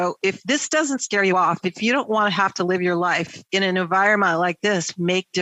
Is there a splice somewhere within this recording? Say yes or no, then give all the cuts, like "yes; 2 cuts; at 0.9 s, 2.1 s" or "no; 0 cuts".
yes; 1 cut; at 3.3 s